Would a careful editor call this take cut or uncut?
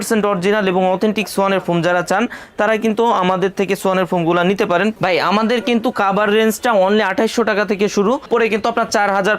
cut